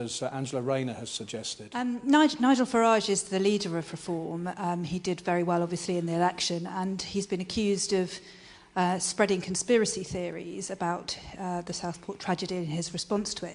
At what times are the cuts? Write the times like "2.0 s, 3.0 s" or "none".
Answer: 1.9 s